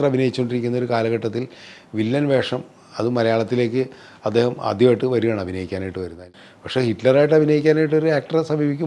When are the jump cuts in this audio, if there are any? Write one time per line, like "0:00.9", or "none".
0:06.2